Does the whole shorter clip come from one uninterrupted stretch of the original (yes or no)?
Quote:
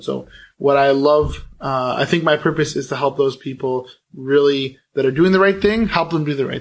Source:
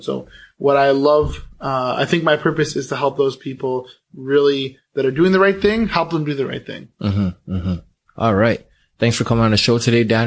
yes